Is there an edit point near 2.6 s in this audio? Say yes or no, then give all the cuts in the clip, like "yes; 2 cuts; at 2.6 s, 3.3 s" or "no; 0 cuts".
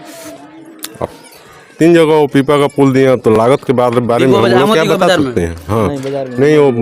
no; 0 cuts